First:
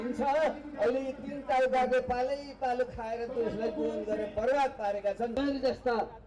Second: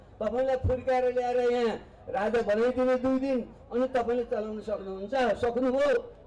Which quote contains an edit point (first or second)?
first